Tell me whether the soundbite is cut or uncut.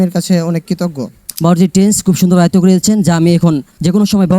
cut